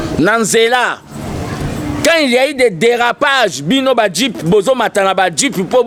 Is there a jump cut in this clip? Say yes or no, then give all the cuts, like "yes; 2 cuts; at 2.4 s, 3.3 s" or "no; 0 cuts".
no; 0 cuts